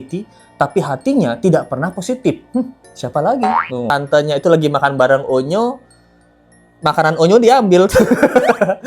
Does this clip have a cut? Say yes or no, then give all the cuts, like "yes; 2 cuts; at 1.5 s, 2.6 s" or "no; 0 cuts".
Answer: yes; 1 cut; at 3.9 s